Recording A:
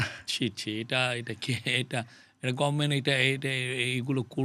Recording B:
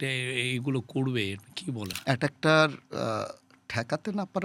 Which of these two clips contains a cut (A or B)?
B